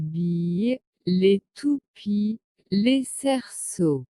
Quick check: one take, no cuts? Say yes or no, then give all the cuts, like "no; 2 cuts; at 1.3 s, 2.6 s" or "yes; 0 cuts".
no; 1 cut; at 2.5 s